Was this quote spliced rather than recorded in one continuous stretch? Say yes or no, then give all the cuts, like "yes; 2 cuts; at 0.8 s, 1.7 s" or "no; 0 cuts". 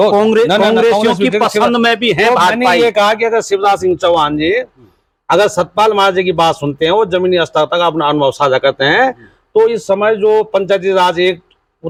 no; 0 cuts